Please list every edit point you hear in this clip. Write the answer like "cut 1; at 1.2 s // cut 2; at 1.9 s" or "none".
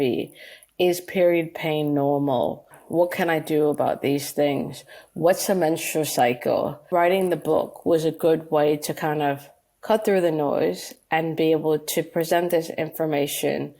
cut 1; at 2.8 s // cut 2; at 6.9 s